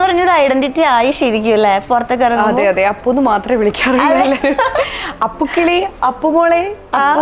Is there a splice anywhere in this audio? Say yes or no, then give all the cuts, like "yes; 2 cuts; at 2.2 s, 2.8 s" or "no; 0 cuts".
no; 0 cuts